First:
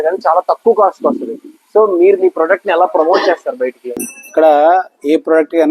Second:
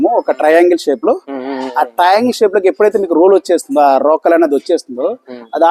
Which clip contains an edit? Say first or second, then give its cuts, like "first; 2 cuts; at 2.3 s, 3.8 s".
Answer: first; 1 cut; at 3.8 s